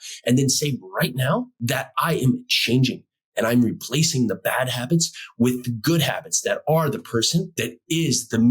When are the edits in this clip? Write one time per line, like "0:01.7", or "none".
0:01.5
0:07.6